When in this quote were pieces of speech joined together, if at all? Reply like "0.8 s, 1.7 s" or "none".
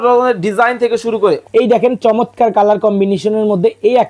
1.4 s

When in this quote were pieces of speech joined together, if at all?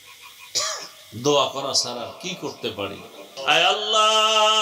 3.2 s

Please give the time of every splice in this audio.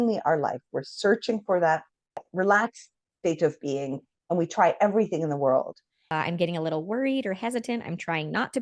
2.3 s, 6.1 s

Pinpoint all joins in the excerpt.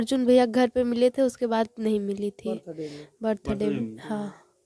none

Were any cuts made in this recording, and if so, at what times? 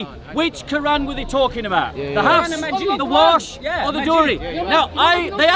none

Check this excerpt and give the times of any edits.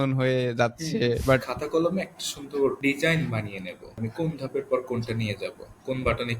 1.5 s, 2.8 s, 4.0 s

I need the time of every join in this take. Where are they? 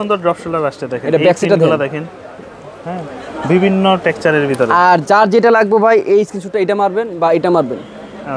none

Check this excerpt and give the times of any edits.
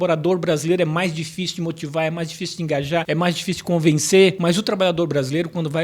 3.0 s, 4.4 s

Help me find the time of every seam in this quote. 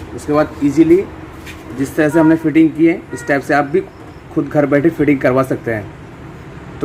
none

